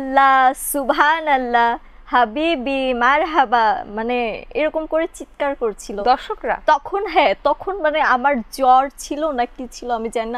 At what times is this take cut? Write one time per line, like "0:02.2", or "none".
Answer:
none